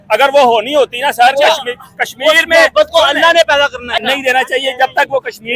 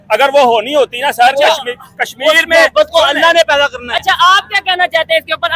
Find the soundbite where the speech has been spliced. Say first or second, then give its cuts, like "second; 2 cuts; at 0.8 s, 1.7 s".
first; 1 cut; at 4.0 s